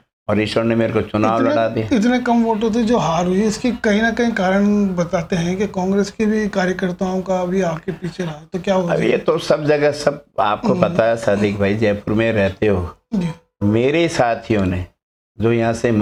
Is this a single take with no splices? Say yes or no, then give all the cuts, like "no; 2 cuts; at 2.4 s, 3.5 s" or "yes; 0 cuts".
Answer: yes; 0 cuts